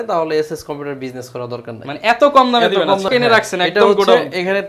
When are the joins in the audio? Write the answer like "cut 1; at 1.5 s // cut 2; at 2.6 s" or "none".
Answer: cut 1; at 3.1 s